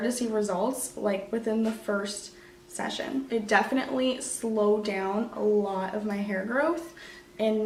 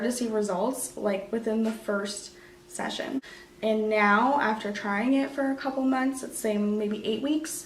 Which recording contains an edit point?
second; 1 cut; at 3.2 s

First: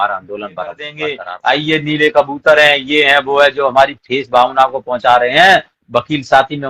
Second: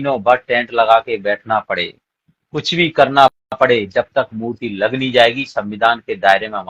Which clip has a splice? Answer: first; 1 cut; at 1.1 s

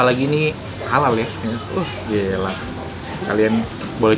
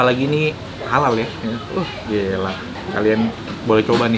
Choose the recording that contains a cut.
second; 1 cut; at 2.7 s

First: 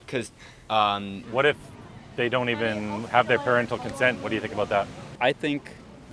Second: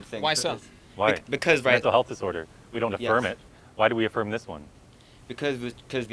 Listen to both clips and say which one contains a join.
first; 2 cuts; at 1.2 s, 5.0 s

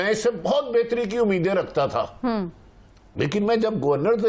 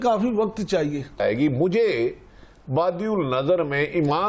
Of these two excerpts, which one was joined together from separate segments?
second; 1 cut; at 1.2 s

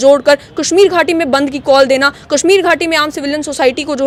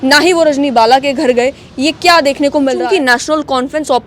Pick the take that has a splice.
second; 1 cut; at 2.8 s

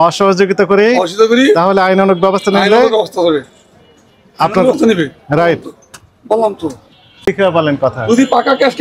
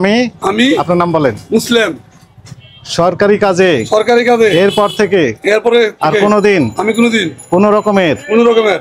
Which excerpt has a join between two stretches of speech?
first; 1 cut; at 7.3 s

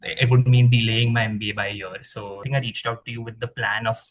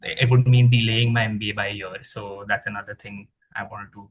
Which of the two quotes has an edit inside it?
first; 1 cut; at 2.4 s

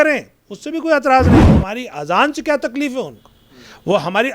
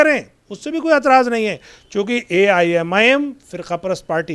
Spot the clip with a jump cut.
first; 1 cut; at 1.4 s

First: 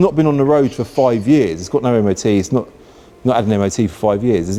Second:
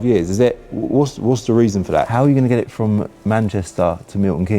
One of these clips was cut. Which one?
second; 1 cut; at 2.1 s

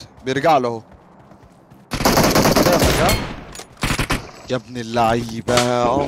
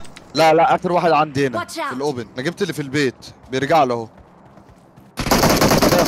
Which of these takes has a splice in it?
second; 1 cut; at 2.3 s

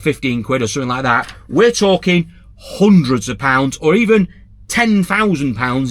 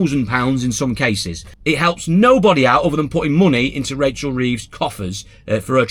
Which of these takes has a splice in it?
second; 1 cut; at 1.6 s

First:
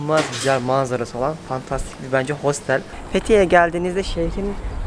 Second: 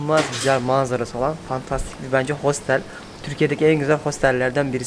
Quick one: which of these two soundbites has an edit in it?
first; 1 cut; at 3.0 s

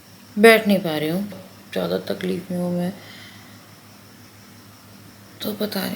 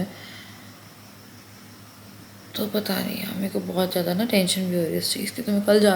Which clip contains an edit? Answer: first; 1 cut; at 1.3 s

